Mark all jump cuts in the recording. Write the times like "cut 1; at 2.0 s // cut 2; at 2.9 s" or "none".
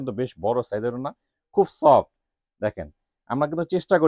none